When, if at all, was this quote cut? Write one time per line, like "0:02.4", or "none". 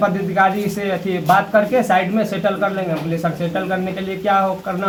none